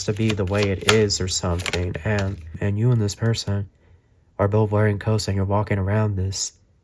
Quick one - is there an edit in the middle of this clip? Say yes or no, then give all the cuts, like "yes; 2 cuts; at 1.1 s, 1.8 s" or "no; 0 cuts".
yes; 1 cut; at 2.6 s